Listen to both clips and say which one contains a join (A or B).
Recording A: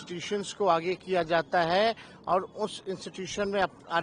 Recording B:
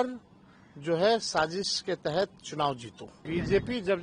B